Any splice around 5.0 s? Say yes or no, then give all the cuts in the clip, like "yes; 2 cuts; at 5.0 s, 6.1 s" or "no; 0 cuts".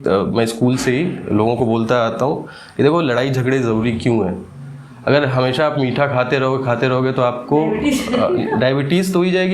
no; 0 cuts